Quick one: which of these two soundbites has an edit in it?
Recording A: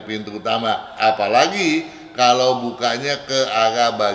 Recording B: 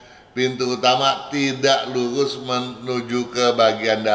A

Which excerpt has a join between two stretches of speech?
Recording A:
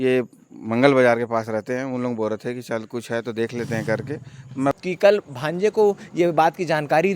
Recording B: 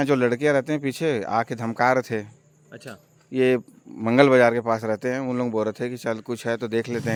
A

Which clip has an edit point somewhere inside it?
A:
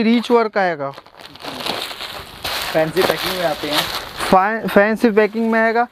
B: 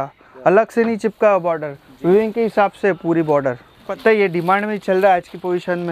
B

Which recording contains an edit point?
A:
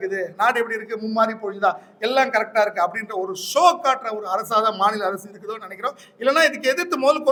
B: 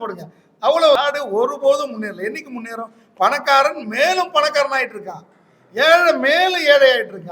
B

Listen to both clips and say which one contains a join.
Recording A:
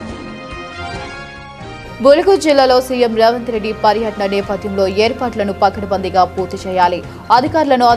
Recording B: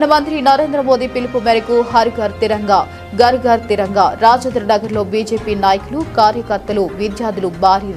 A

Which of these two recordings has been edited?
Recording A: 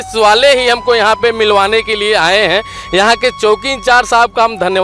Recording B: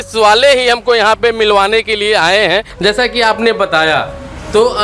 B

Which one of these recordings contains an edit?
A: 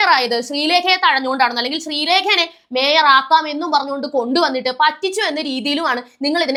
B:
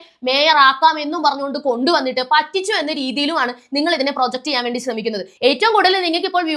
B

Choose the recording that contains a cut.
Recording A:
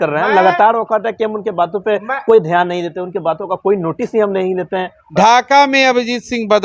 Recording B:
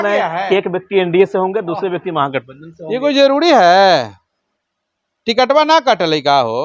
A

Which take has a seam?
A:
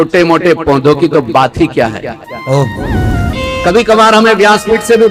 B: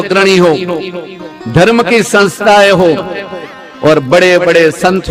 A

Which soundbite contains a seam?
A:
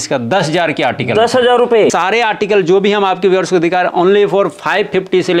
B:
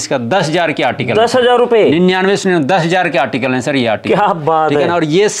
A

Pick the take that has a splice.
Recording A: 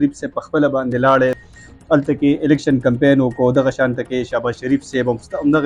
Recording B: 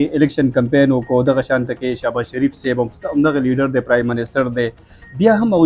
A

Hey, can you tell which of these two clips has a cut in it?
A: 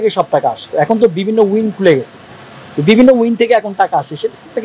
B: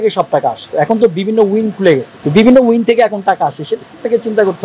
B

